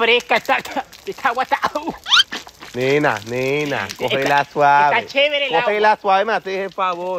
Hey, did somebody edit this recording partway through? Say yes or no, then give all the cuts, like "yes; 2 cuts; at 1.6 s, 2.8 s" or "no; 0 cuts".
no; 0 cuts